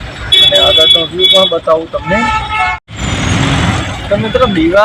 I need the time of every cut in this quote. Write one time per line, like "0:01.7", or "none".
none